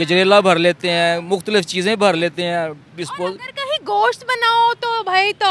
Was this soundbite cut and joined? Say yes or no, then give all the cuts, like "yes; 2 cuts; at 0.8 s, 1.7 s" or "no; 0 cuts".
no; 0 cuts